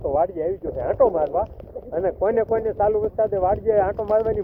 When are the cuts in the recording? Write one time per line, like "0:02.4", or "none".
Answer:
none